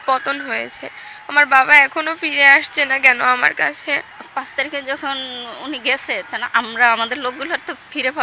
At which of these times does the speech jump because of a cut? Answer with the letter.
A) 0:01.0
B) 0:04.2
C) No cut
B